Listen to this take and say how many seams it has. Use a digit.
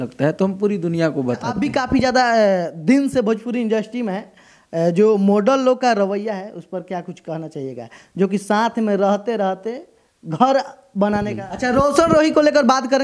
2